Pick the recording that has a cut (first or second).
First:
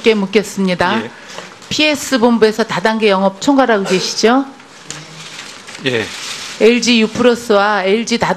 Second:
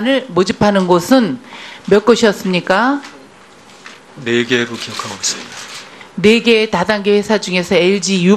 second